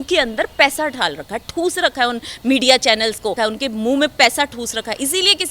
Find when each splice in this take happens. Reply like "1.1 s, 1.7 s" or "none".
3.4 s